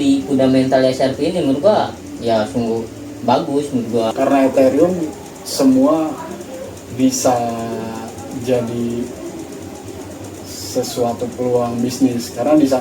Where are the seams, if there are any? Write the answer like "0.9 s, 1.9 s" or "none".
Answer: 4.1 s